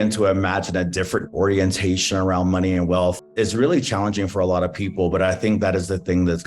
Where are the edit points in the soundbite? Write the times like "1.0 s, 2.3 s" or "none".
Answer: 1.3 s, 3.3 s